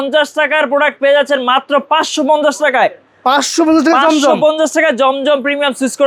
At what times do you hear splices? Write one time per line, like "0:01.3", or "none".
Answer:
none